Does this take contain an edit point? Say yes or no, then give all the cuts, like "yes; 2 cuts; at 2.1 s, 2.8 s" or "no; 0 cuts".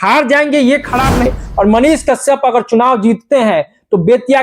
yes; 1 cut; at 1.2 s